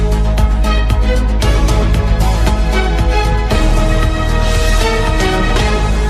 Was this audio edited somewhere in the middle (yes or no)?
no